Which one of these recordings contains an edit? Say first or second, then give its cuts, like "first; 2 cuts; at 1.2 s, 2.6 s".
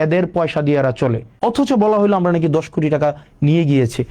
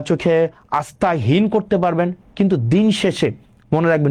first; 1 cut; at 1.3 s